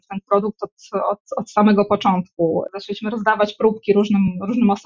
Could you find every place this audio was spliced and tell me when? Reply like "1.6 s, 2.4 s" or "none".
2.7 s